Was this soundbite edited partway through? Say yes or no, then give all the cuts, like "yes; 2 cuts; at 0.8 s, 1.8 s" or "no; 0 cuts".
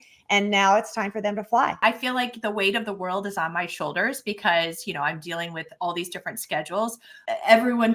yes; 2 cuts; at 1.8 s, 7.1 s